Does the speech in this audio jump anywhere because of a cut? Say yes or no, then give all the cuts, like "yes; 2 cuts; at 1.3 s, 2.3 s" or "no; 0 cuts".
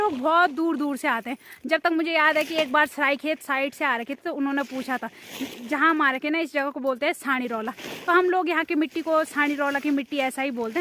no; 0 cuts